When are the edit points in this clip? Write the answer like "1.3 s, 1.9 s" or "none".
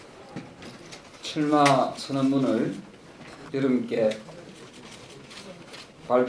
1.1 s